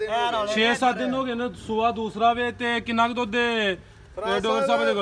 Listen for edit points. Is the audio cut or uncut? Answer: uncut